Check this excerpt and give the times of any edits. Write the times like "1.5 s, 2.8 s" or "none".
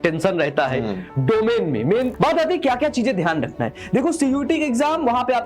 2.1 s